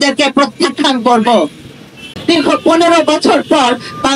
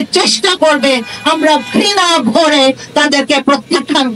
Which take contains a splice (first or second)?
first